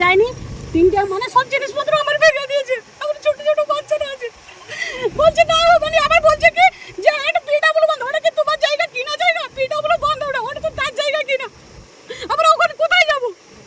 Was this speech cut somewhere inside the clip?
no; 0 cuts

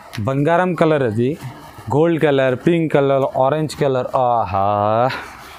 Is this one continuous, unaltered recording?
yes; 0 cuts

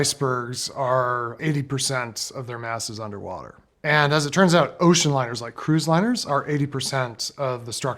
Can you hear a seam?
yes; 2 cuts; at 1.4 s, 3.6 s

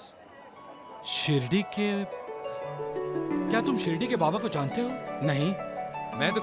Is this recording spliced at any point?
no; 0 cuts

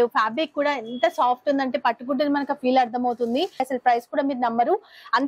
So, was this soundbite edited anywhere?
yes; 1 cut; at 3.7 s

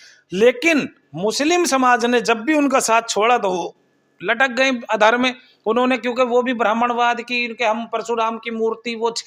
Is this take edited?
no; 0 cuts

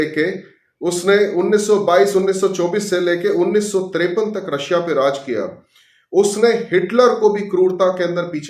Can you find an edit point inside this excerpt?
no; 0 cuts

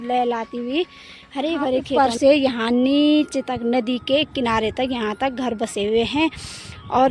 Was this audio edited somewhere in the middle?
yes; 1 cut; at 2.0 s

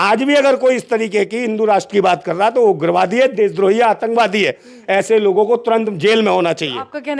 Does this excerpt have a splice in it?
no; 0 cuts

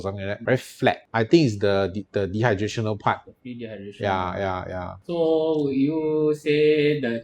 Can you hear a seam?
yes; 1 cut; at 1.0 s

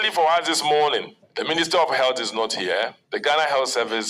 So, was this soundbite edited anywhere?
yes; 2 cuts; at 1.2 s, 3.0 s

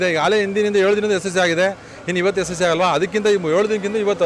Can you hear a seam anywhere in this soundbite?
no; 0 cuts

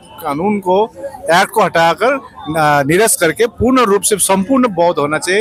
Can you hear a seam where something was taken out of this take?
no; 0 cuts

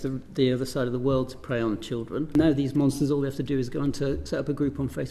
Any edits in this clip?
yes; 1 cut; at 2.3 s

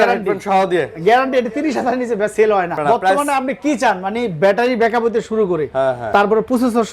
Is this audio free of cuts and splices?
no; 2 cuts; at 2.8 s, 6.0 s

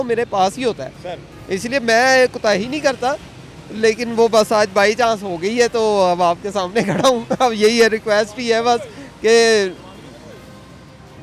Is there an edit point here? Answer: no; 0 cuts

